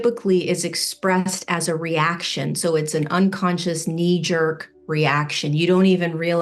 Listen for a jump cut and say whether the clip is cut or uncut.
uncut